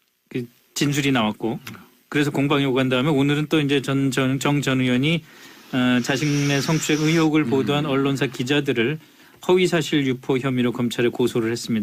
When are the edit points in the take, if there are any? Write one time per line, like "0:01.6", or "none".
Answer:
none